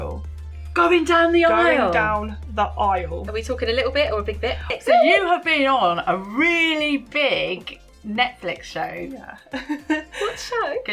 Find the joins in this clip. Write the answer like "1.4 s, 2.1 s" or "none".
4.8 s